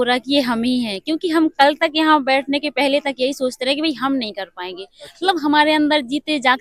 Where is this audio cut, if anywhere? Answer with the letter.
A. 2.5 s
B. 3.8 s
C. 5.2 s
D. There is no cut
D